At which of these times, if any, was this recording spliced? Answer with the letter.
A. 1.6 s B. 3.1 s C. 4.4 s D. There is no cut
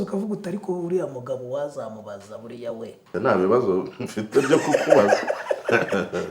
B